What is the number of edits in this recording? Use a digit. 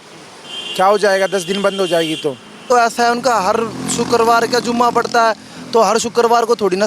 1